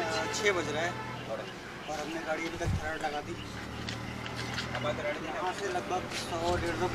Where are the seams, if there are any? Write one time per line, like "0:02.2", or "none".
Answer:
none